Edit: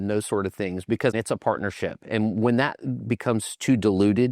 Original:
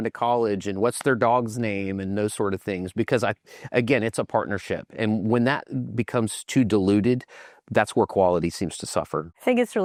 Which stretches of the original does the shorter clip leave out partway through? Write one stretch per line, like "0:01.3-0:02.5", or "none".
0:03.2-0:04.0